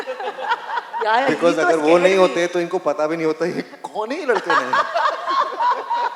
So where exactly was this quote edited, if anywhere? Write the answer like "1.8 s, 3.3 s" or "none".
none